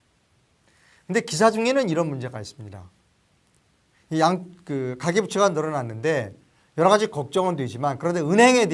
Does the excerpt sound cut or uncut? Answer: uncut